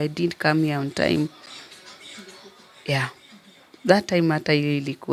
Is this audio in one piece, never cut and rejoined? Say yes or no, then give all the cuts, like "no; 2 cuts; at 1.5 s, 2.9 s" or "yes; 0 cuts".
yes; 0 cuts